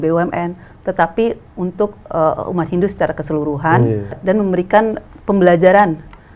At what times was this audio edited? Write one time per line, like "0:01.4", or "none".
0:04.2
0:05.1